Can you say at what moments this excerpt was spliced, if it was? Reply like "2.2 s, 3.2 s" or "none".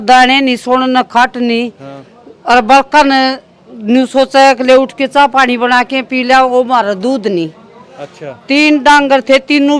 none